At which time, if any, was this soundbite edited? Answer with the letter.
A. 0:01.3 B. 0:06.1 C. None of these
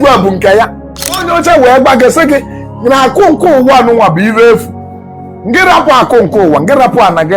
A